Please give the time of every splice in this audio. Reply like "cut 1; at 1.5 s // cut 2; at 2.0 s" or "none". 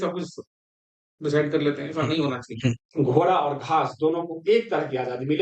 cut 1; at 2.8 s